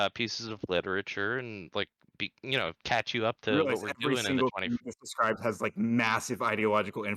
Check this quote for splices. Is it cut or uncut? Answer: uncut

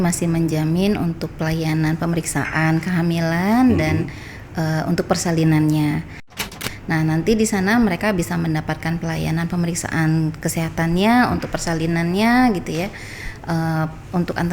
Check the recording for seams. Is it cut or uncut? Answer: cut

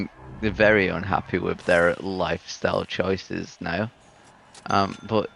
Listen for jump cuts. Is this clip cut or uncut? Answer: uncut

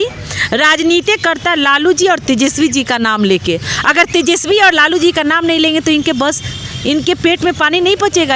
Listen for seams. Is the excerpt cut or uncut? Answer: uncut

